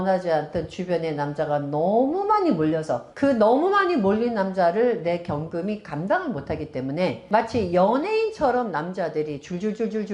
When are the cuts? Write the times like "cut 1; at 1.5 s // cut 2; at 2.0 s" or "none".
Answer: cut 1; at 3.0 s // cut 2; at 7.2 s